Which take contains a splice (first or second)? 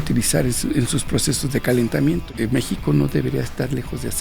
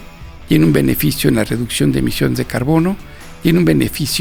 first